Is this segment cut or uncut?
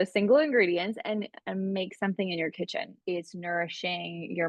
cut